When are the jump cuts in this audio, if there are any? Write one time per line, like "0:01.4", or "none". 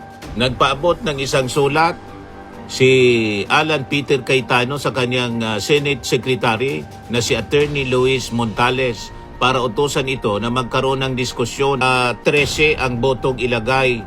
0:12.2